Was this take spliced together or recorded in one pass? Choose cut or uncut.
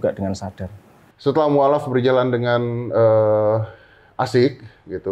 cut